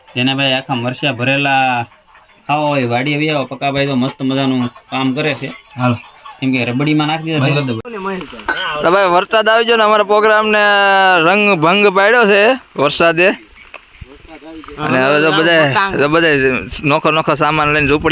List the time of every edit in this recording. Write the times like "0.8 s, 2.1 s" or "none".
7.9 s